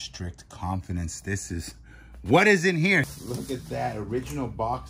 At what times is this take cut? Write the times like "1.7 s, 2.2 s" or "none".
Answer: 3.0 s

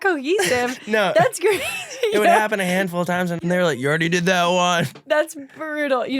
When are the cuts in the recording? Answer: 3.4 s

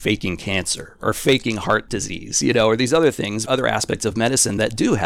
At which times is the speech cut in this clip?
1.9 s

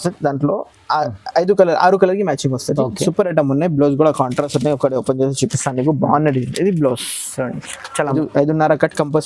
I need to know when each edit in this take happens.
8.1 s

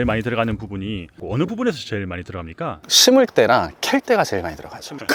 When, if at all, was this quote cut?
none

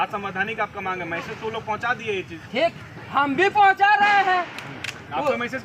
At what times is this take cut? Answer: none

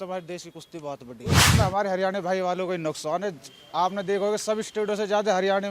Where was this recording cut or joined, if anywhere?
1.5 s

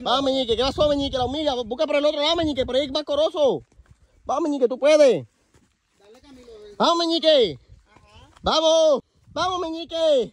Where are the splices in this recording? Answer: 9.2 s

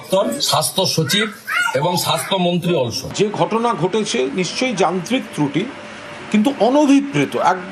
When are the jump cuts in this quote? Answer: 3.0 s

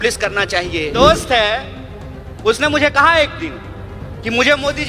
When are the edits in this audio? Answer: 0.9 s

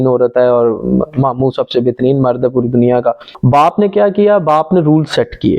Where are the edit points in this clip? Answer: 3.3 s

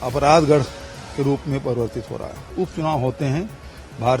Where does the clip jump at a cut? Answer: 2.5 s

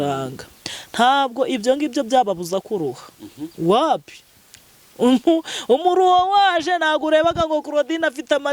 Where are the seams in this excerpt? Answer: none

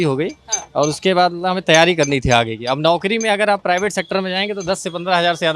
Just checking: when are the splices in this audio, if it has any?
none

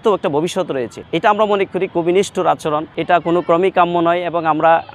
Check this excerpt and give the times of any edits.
none

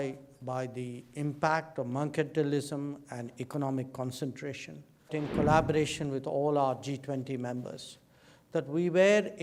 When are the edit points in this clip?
5.1 s

